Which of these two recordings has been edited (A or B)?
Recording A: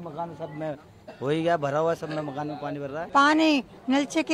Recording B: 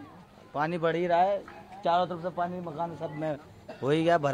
A